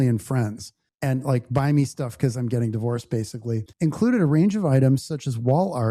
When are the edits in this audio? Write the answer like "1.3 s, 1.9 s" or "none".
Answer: 3.7 s